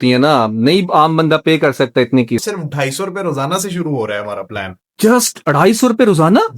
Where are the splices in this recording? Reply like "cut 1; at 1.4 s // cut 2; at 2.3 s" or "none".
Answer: cut 1; at 2.4 s